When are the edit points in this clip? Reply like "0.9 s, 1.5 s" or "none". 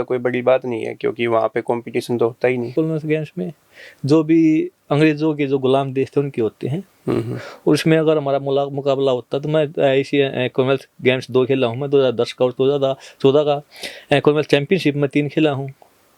none